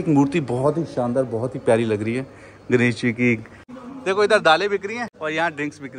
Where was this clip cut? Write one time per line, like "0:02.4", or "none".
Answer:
0:03.7
0:05.1